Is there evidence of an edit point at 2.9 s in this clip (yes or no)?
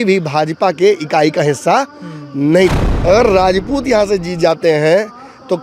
yes